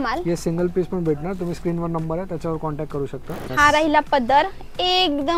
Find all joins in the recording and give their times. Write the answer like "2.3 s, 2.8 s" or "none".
3.5 s